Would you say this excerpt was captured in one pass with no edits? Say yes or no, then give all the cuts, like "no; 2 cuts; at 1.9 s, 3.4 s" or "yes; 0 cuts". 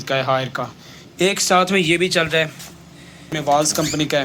no; 1 cut; at 3.3 s